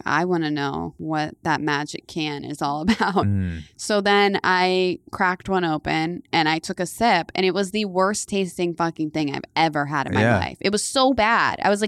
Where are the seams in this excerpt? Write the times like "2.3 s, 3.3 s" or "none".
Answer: 0.9 s